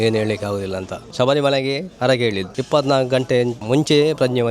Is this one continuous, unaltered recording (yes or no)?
no